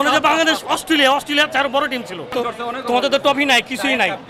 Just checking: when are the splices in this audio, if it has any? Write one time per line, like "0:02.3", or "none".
0:02.3